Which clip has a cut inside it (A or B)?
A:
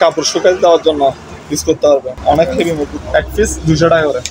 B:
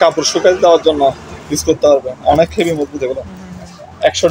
A